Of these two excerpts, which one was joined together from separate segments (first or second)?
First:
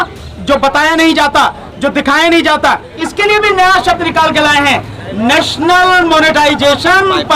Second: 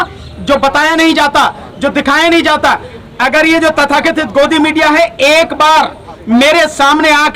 first